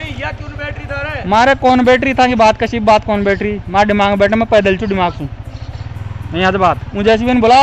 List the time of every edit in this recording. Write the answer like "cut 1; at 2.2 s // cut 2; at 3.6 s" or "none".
none